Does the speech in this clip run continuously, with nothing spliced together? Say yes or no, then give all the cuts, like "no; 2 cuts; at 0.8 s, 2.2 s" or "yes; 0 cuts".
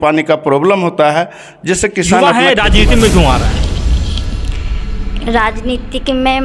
no; 1 cut; at 2.2 s